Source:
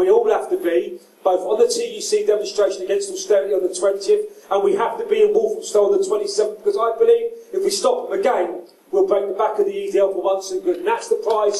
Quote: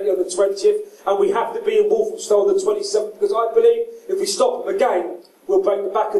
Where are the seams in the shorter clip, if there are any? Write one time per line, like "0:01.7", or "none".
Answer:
none